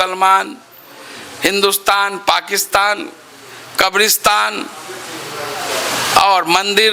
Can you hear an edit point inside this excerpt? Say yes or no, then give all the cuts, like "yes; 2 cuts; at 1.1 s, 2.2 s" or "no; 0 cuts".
no; 0 cuts